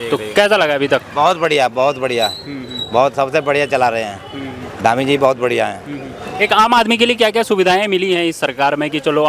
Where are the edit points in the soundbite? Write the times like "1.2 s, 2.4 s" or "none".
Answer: none